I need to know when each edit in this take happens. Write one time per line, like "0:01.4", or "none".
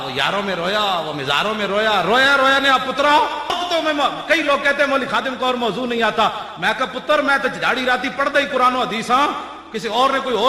0:03.6